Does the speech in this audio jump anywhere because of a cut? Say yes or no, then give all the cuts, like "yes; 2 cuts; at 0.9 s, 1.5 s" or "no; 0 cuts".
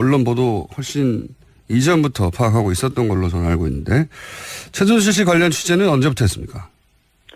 no; 0 cuts